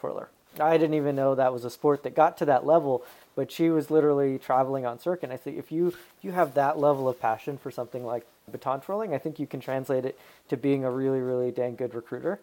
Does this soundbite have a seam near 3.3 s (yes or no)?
no